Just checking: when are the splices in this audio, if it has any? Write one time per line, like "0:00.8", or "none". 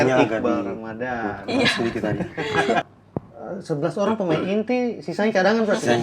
0:02.9

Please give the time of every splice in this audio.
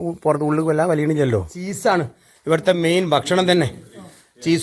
0:01.6

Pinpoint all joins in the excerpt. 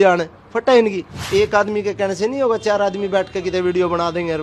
0:01.1

